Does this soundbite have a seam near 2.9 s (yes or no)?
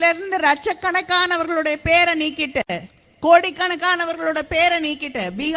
no